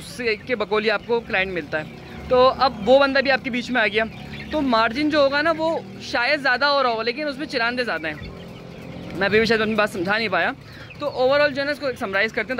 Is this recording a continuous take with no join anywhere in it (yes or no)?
yes